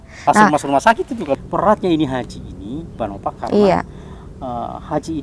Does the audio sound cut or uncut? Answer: cut